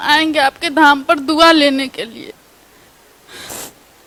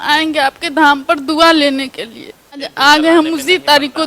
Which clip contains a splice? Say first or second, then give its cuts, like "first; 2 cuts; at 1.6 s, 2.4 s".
second; 1 cut; at 2.7 s